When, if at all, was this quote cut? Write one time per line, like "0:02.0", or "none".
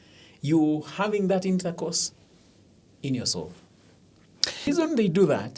0:04.7